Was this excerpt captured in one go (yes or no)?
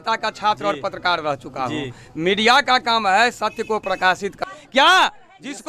no